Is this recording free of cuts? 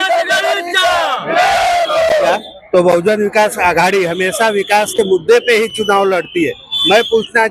no; 1 cut; at 2.3 s

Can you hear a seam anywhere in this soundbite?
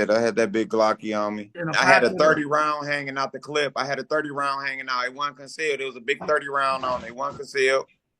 yes; 1 cut; at 1.5 s

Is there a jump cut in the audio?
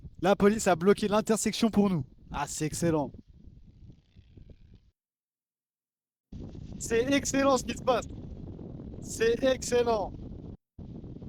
no; 0 cuts

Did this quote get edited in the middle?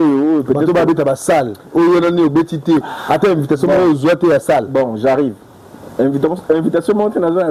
no; 0 cuts

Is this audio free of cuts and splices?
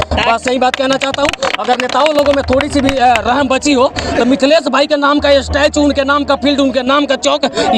yes; 0 cuts

